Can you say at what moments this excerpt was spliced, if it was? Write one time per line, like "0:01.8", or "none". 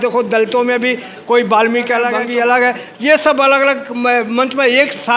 0:02.3